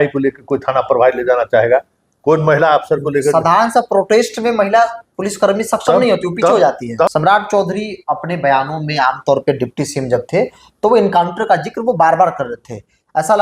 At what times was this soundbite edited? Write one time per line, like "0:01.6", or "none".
0:07.1

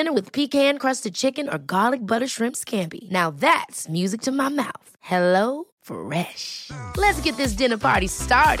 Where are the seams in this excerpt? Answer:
none

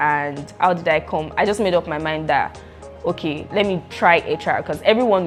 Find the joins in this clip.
none

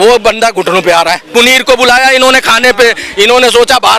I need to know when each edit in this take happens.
0:01.3

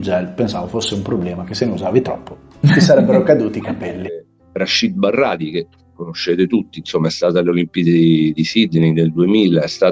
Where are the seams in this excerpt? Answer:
0:04.0

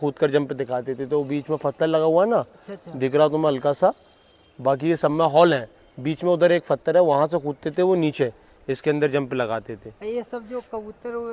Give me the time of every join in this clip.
none

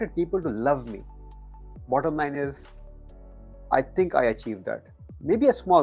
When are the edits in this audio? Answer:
none

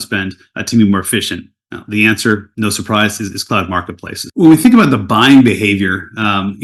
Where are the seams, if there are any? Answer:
none

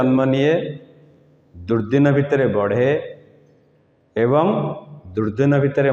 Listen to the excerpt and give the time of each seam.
none

